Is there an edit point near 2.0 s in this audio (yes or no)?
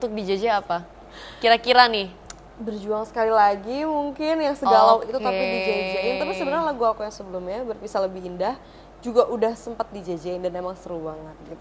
no